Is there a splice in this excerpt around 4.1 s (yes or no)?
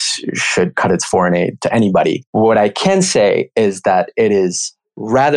no